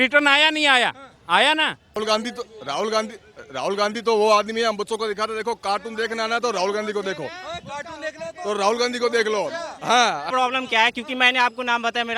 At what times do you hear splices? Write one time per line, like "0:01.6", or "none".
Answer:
0:02.0
0:10.3